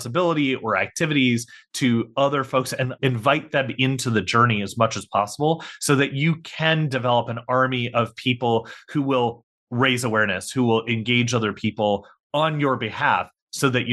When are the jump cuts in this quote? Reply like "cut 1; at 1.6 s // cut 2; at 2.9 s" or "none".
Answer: cut 1; at 2.9 s